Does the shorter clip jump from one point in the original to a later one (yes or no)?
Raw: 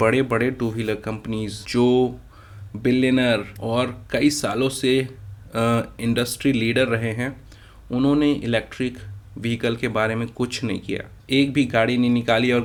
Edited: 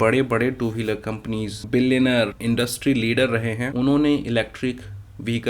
yes